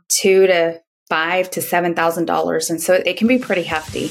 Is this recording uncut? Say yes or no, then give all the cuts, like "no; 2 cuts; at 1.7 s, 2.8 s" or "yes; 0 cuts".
no; 1 cut; at 3.0 s